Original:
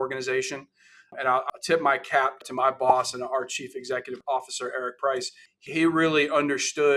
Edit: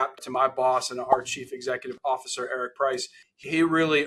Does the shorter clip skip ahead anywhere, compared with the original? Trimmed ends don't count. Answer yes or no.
no